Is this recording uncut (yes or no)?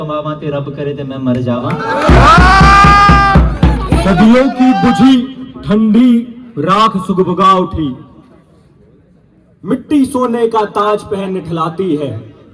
no